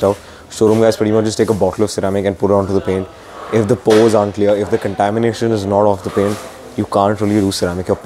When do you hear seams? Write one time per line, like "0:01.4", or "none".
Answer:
none